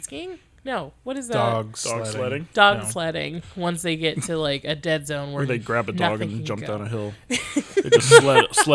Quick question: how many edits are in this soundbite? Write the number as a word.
zero